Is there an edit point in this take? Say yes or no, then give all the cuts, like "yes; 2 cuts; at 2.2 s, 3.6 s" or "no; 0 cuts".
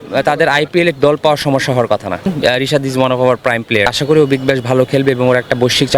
yes; 2 cuts; at 2.3 s, 3.9 s